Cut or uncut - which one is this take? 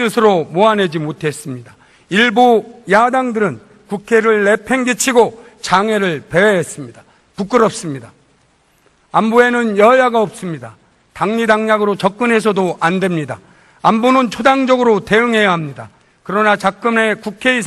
uncut